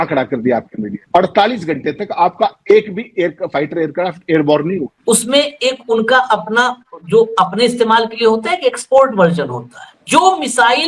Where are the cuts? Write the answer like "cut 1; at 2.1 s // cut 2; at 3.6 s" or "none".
cut 1; at 4.9 s